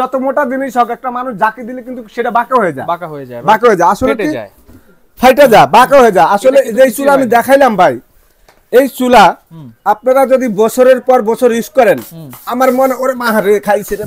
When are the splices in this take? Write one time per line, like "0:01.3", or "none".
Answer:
none